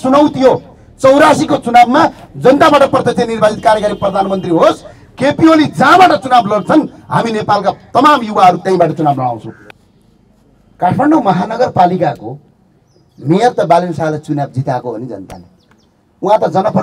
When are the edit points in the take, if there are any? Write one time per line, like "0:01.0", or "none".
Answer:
0:09.5